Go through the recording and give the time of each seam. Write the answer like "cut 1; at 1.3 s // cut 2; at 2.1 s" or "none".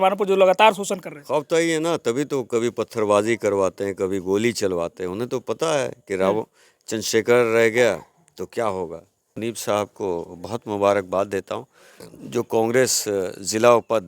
cut 1; at 9.4 s